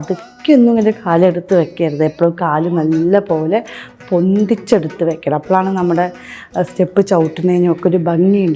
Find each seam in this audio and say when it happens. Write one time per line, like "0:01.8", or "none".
none